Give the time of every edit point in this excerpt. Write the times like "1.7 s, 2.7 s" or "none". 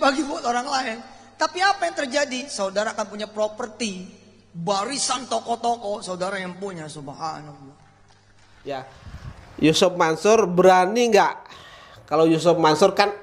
8.8 s